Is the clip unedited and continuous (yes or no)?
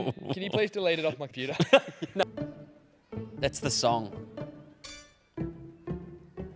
no